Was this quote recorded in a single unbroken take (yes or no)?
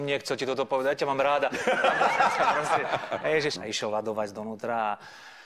no